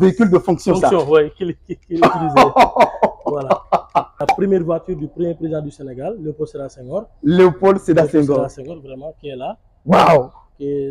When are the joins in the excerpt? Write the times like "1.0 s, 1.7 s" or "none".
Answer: 4.3 s